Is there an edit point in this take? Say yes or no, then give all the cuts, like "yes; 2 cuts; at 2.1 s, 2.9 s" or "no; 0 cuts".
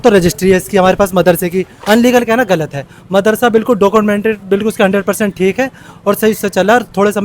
yes; 1 cut; at 1.7 s